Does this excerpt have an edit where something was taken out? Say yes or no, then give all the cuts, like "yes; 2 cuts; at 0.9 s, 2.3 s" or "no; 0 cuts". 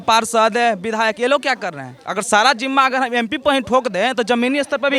no; 0 cuts